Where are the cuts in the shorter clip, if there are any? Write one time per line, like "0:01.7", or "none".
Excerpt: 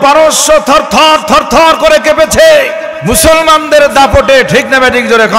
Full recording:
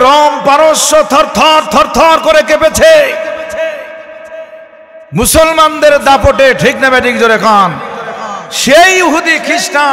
0:02.9